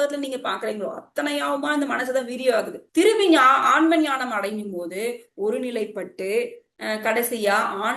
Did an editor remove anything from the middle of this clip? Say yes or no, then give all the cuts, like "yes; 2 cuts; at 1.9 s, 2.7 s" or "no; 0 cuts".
no; 0 cuts